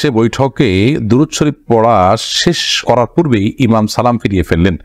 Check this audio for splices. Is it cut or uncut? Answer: uncut